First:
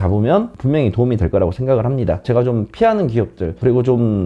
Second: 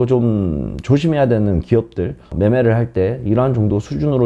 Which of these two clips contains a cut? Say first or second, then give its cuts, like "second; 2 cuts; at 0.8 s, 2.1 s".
first; 1 cut; at 2.2 s